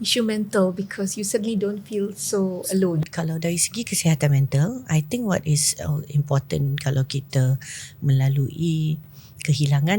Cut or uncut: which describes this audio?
cut